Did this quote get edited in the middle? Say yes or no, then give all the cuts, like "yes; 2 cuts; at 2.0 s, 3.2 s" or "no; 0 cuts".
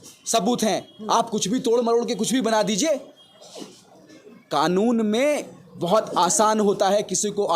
no; 0 cuts